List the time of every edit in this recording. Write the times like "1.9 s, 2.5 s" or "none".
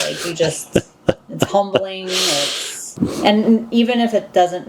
2.9 s